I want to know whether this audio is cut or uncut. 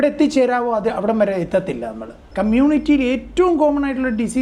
cut